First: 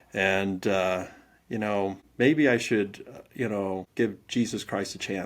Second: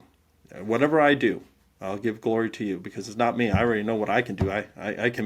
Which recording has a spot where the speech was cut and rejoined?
first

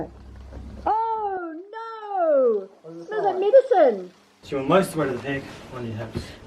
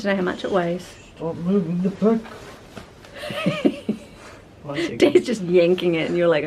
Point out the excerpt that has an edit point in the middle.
first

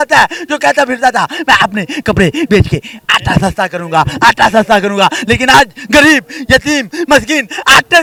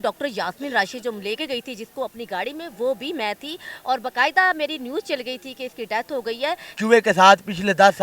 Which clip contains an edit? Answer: second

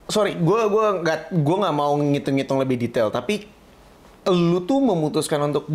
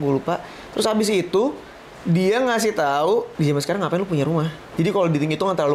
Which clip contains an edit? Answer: second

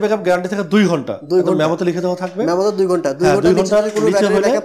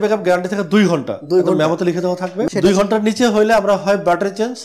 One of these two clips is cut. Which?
second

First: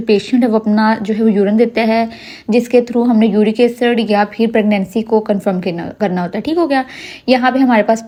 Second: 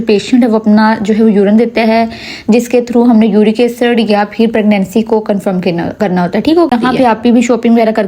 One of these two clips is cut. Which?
second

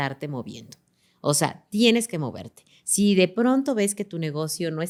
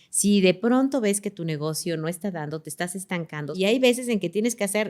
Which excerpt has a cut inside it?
second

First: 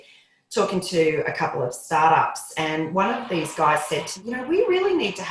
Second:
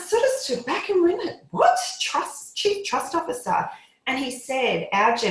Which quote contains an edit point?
first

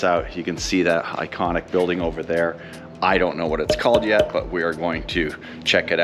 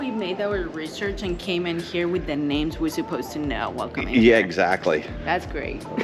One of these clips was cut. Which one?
second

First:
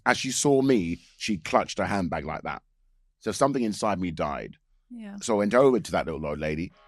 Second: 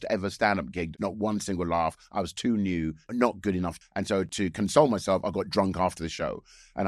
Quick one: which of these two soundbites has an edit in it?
second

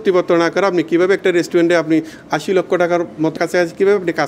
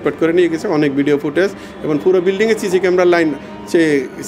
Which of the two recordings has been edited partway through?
first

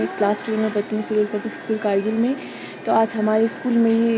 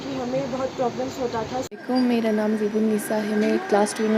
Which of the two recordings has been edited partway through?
second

